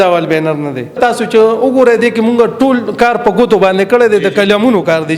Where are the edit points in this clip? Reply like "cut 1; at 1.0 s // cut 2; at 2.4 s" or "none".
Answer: cut 1; at 1.0 s